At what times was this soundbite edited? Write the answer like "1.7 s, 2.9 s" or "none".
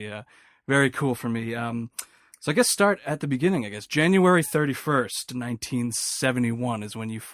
5.6 s